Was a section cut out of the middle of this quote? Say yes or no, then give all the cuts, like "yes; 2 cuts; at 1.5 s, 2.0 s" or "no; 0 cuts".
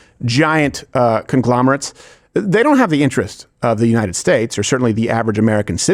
no; 0 cuts